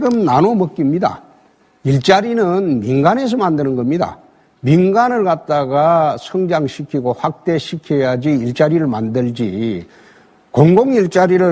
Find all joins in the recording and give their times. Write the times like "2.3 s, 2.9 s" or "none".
2.5 s